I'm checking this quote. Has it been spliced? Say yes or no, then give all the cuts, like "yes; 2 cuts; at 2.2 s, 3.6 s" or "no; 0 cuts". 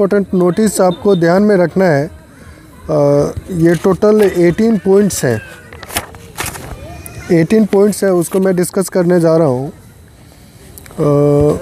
no; 0 cuts